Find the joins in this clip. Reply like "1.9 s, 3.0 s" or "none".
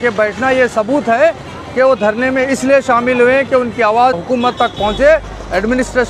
4.1 s

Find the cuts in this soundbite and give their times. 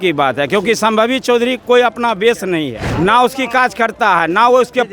2.9 s

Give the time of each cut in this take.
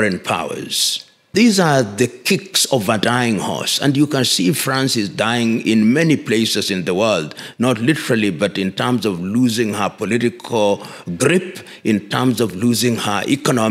1.3 s

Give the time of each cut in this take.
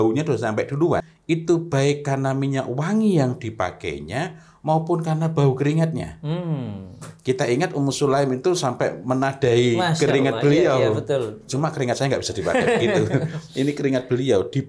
1.1 s

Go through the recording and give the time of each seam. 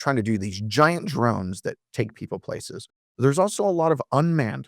1.8 s

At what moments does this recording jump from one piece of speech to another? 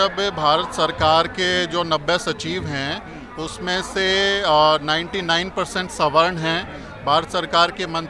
none

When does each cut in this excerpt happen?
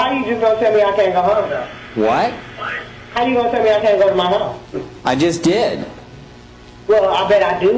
none

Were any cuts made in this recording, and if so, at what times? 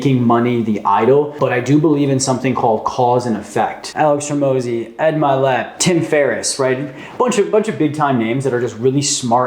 1.3 s, 3.8 s, 5.8 s

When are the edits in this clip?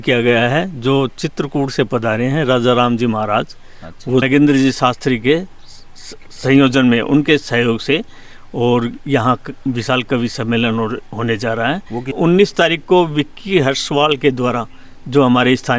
4.2 s, 12.1 s

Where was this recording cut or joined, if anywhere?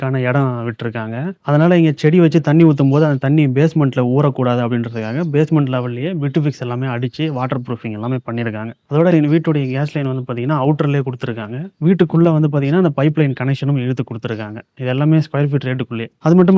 none

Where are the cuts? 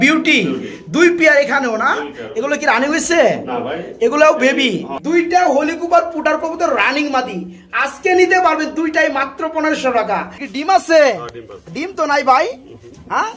4.9 s, 10.4 s

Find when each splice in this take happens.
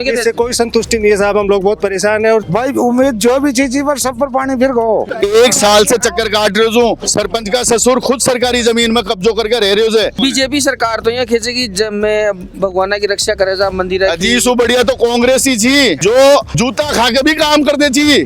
2.4 s, 5.1 s, 7.1 s, 10.1 s, 16.0 s

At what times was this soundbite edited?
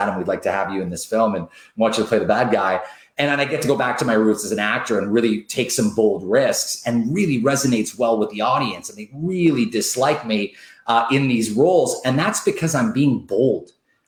none

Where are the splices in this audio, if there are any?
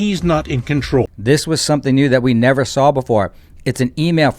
1.1 s

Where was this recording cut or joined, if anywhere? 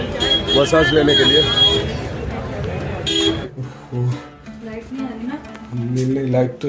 3.4 s

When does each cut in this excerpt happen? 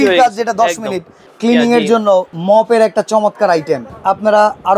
1.2 s, 2.3 s, 3.9 s

